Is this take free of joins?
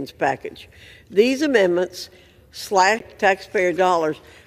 yes; 0 cuts

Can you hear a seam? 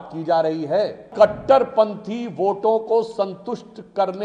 yes; 1 cut; at 1.1 s

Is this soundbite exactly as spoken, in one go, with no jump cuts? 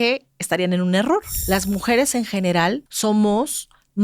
no; 2 cuts; at 1.3 s, 2.9 s

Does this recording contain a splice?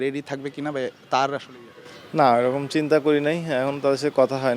no; 0 cuts

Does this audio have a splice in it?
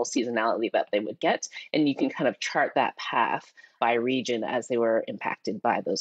no; 0 cuts

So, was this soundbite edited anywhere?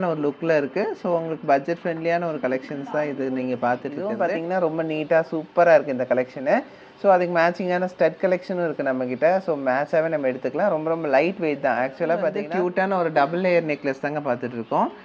yes; 2 cuts; at 4.0 s, 12.4 s

